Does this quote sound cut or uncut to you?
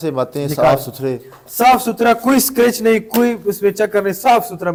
uncut